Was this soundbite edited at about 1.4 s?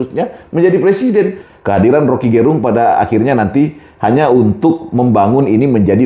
yes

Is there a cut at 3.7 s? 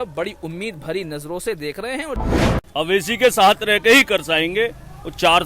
no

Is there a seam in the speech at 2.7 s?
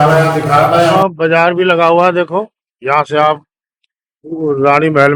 no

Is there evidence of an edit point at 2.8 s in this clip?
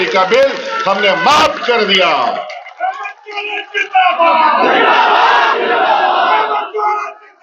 no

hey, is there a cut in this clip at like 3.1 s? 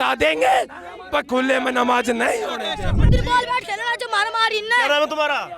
yes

